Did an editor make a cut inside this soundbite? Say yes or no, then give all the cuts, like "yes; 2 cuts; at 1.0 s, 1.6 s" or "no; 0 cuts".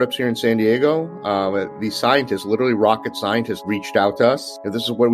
yes; 1 cut; at 3.5 s